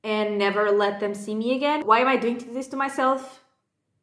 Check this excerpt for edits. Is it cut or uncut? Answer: cut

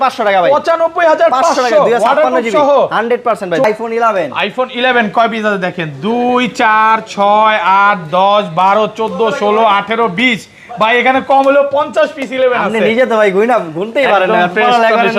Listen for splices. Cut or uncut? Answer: cut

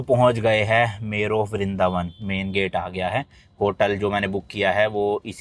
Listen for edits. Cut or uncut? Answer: uncut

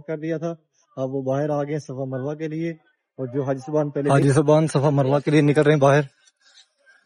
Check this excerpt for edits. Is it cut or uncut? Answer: cut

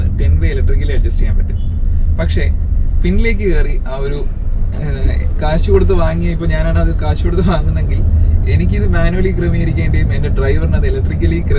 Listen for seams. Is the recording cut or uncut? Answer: uncut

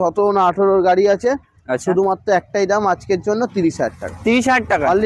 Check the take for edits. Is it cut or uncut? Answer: uncut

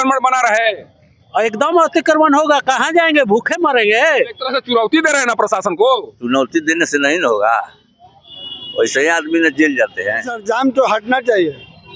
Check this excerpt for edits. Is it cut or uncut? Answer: cut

